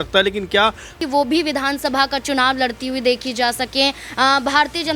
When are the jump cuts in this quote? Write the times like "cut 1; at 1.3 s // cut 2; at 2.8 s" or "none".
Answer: cut 1; at 1.0 s